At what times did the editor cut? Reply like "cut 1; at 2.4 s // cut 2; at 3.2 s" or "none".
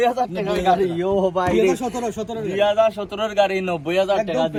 none